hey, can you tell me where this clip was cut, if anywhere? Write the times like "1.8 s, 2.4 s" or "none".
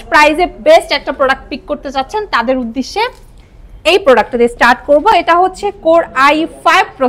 none